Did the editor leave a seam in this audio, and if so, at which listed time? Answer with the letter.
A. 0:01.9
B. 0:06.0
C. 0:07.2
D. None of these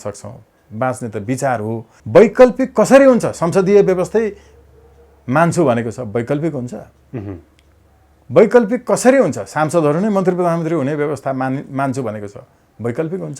A